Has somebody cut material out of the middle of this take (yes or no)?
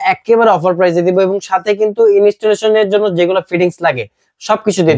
no